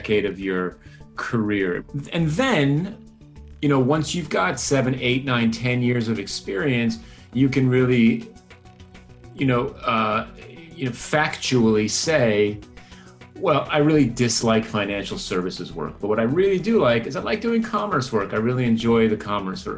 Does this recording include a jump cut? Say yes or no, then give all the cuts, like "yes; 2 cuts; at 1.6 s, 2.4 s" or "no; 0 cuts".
yes; 1 cut; at 1.8 s